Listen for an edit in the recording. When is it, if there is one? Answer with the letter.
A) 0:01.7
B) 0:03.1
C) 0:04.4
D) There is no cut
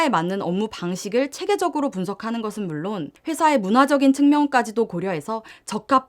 B